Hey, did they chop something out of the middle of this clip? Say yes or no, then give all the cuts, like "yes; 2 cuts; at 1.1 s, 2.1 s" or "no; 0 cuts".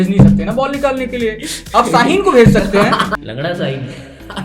yes; 1 cut; at 3.1 s